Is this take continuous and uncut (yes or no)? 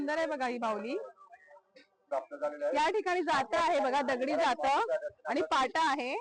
no